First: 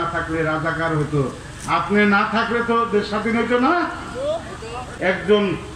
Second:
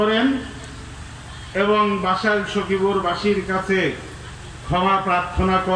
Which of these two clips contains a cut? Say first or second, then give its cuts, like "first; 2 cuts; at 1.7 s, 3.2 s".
first; 1 cut; at 4.8 s